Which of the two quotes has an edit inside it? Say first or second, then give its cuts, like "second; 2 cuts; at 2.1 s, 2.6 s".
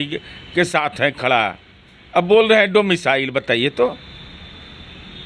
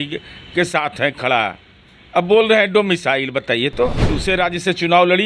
second; 1 cut; at 4.2 s